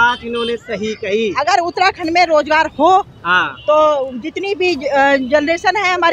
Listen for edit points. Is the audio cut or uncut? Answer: uncut